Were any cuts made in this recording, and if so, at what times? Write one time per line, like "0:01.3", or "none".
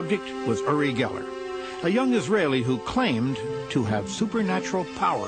0:01.1